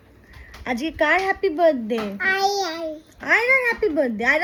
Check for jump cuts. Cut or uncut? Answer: uncut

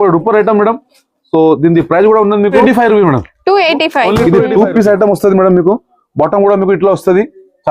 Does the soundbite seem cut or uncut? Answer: cut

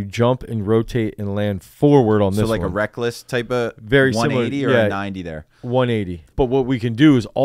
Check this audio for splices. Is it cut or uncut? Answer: cut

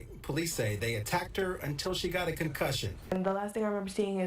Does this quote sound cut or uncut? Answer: cut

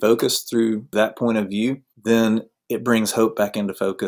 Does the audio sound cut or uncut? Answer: cut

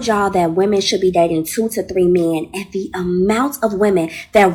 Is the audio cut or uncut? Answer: uncut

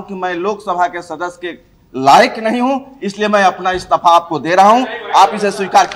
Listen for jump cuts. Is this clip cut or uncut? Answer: uncut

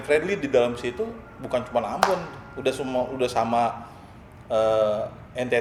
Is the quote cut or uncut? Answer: uncut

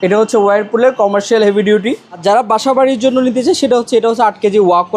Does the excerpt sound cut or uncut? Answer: cut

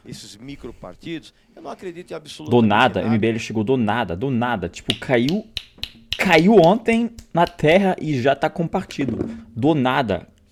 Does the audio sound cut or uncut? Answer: uncut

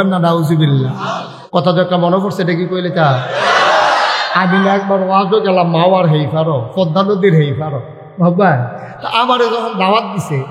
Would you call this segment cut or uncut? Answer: cut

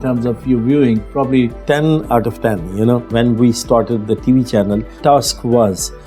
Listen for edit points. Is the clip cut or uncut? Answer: cut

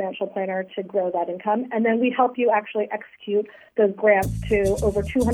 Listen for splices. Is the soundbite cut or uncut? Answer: uncut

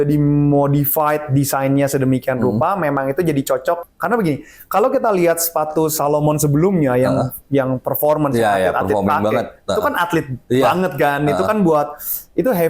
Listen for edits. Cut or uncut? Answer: cut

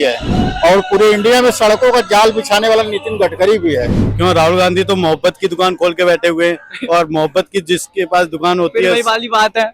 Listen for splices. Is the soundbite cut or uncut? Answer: cut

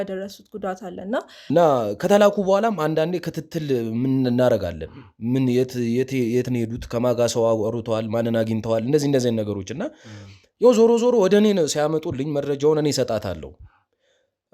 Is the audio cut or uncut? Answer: cut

